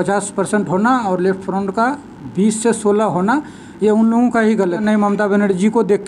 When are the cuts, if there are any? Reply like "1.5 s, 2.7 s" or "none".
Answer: 4.8 s